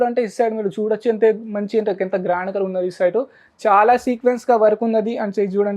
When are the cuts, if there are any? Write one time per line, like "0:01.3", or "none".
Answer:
none